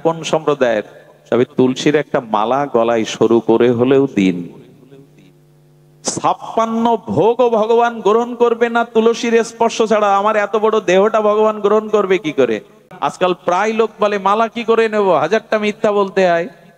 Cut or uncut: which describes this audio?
cut